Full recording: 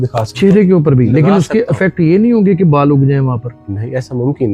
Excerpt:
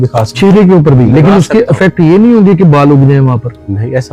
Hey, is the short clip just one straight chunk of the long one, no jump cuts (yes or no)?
yes